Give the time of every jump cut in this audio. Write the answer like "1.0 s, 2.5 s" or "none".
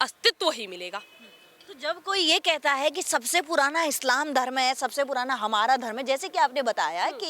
none